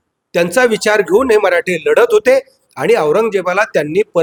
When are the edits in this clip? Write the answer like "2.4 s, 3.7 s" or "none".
none